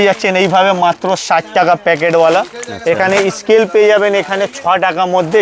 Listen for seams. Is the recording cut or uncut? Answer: uncut